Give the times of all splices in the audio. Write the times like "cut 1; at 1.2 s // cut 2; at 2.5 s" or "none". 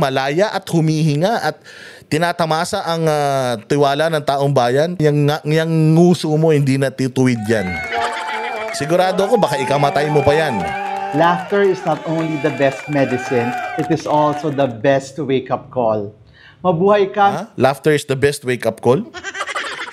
cut 1; at 5.0 s